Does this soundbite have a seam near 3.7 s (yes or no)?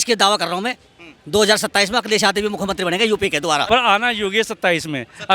yes